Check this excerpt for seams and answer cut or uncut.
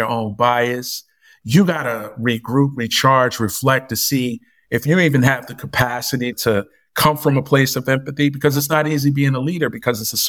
uncut